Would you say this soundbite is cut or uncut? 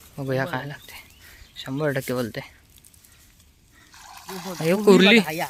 uncut